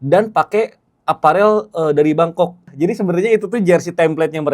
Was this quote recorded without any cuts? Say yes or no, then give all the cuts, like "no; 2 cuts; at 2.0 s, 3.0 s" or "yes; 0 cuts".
no; 1 cut; at 2.7 s